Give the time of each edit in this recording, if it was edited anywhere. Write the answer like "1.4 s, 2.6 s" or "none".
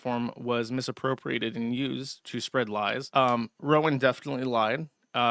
3.0 s